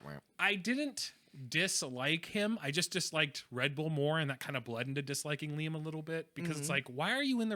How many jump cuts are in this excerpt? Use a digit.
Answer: 0